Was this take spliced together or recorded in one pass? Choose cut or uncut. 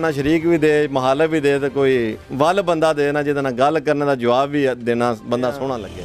uncut